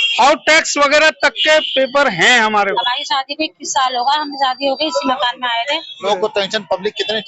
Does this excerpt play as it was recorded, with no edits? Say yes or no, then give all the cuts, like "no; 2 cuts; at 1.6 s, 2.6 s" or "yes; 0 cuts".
no; 2 cuts; at 2.7 s, 6.0 s